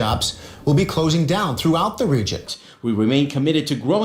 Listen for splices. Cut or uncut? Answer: cut